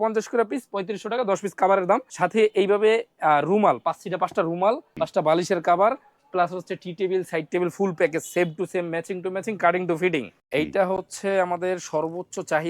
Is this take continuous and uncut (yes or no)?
no